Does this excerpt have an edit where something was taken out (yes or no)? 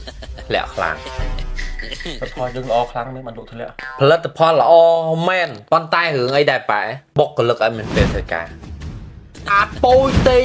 yes